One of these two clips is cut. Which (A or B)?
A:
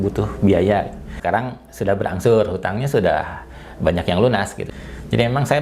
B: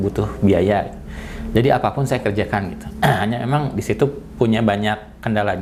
A